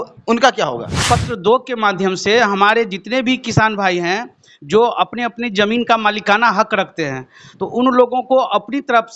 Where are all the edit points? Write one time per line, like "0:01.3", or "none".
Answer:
0:01.0